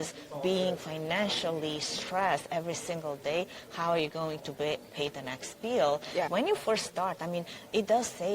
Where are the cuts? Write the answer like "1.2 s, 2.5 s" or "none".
6.3 s